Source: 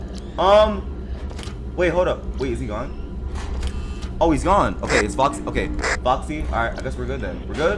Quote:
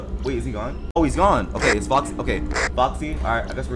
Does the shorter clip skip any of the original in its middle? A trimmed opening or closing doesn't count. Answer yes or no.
yes